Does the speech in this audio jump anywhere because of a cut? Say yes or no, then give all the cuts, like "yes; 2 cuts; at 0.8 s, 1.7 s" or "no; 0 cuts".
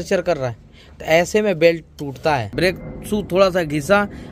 yes; 1 cut; at 2.5 s